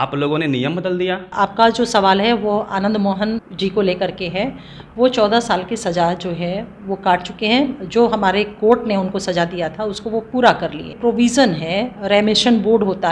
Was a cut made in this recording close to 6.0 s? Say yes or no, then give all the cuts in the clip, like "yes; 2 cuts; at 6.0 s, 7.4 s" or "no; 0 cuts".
no; 3 cuts; at 1.3 s, 3.4 s, 11.0 s